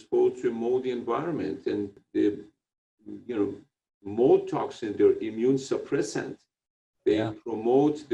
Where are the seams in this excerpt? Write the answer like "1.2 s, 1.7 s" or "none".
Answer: 2.0 s

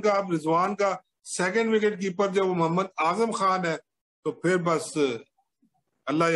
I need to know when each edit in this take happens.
none

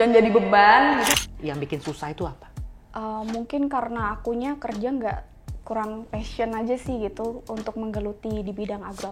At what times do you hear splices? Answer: 1.1 s

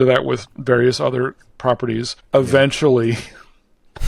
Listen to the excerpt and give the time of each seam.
2.1 s

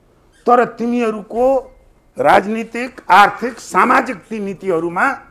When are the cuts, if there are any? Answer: none

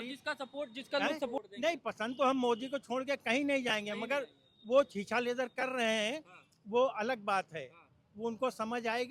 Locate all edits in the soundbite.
1.4 s

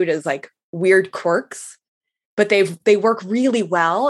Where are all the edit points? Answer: none

